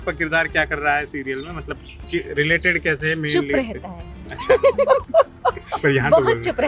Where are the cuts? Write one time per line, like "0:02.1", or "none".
none